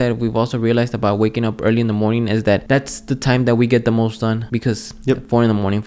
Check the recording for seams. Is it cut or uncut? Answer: cut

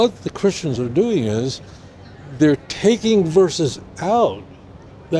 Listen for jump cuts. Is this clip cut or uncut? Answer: uncut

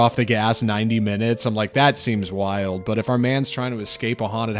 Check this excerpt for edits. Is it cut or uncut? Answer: uncut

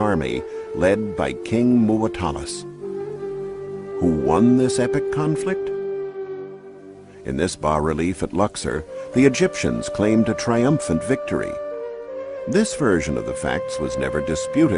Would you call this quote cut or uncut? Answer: cut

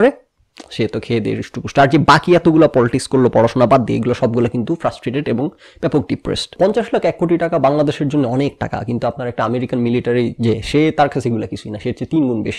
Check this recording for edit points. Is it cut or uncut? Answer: cut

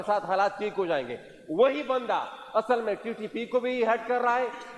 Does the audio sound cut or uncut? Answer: uncut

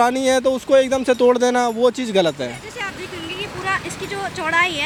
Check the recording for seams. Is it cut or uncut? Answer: uncut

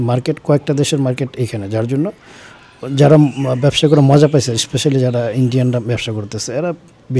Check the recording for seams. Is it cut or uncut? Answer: uncut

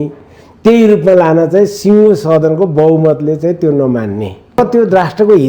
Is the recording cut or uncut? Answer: cut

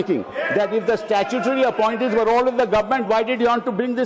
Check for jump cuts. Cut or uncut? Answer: uncut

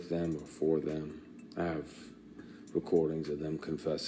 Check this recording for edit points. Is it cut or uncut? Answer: cut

